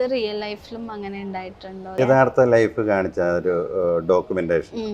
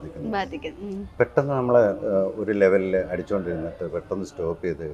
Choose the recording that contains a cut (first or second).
first